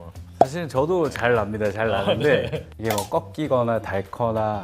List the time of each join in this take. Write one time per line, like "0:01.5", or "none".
0:02.7

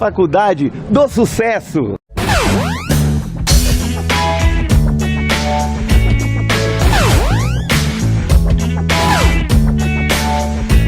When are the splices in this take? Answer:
0:01.9

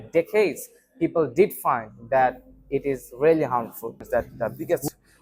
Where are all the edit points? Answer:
0:04.0

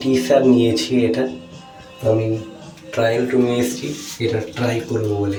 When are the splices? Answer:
none

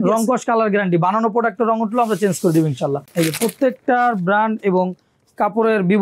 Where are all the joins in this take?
0:03.0

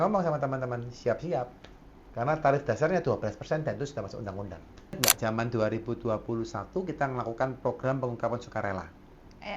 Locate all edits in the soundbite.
0:05.0

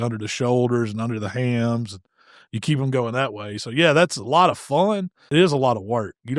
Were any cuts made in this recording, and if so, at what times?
0:05.1

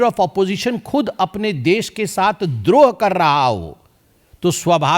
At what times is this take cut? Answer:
none

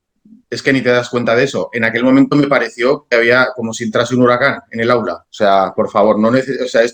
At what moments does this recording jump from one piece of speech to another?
0:05.2

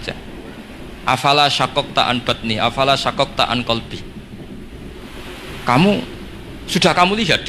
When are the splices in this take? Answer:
0:03.9
0:05.3

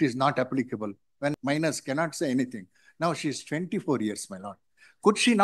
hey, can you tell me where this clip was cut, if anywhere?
0:01.3

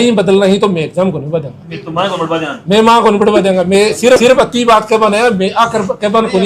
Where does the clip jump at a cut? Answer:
none

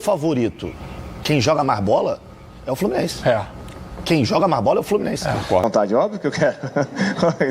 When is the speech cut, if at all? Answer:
0:05.6

